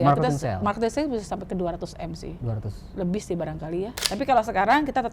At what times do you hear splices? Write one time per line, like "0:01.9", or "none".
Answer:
0:04.0